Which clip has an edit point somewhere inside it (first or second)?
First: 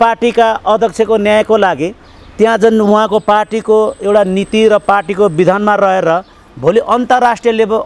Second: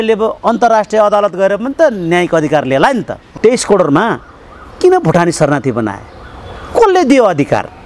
second